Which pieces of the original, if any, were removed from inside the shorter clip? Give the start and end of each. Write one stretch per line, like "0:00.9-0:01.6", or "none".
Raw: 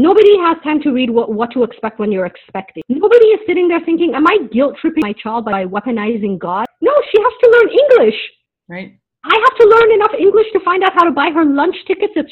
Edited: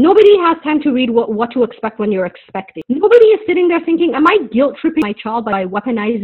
none